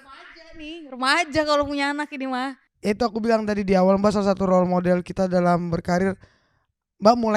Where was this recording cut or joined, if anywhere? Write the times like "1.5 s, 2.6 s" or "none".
2.6 s